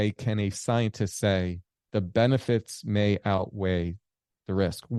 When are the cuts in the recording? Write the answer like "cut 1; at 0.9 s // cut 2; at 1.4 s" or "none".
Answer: none